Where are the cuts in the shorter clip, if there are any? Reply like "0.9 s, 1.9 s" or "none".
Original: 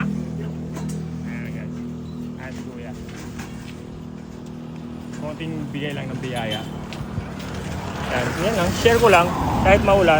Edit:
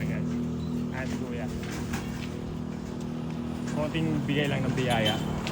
none